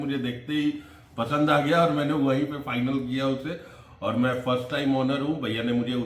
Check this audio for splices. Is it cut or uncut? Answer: uncut